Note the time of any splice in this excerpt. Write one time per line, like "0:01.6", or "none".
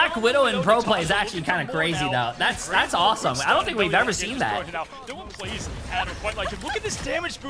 none